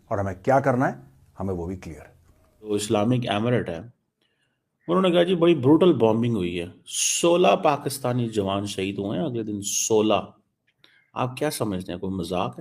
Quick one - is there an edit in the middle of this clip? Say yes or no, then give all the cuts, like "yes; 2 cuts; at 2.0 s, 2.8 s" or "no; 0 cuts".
yes; 1 cut; at 2.7 s